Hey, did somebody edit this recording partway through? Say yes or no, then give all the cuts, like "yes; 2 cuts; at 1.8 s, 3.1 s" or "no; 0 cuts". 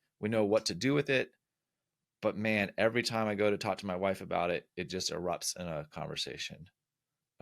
no; 0 cuts